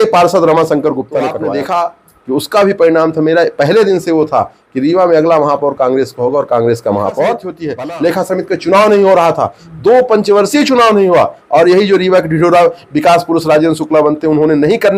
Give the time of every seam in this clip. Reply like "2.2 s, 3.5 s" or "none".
1.4 s, 7.6 s

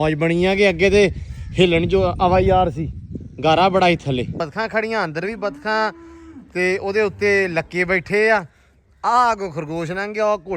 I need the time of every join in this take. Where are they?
4.4 s

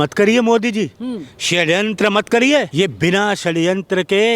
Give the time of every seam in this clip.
2.7 s

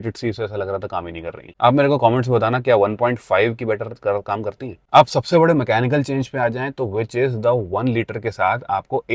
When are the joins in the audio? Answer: none

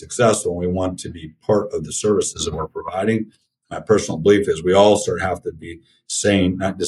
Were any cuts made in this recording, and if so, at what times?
none

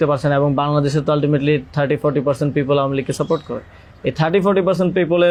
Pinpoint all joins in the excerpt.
none

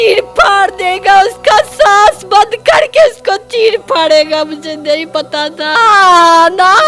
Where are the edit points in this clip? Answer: 5.7 s

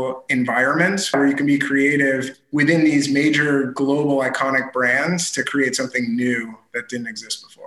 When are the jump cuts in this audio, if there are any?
1.1 s, 2.3 s

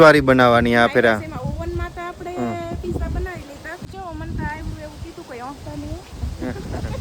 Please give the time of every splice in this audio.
3.8 s

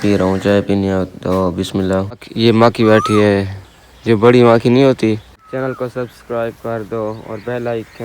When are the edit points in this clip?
2.3 s, 5.4 s

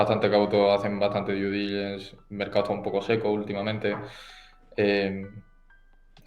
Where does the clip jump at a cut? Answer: none

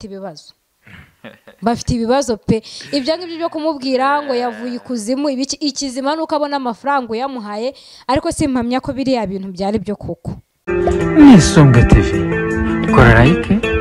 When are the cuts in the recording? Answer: 10.5 s

